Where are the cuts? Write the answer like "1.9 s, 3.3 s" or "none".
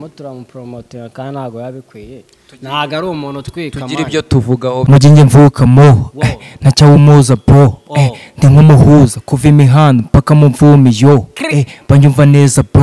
4.8 s